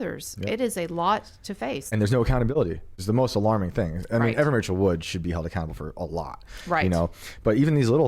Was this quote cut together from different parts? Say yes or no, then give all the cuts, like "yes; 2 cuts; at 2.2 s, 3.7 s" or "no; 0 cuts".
yes; 2 cuts; at 1.9 s, 3.0 s